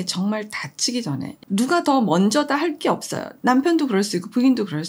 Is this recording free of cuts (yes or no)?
yes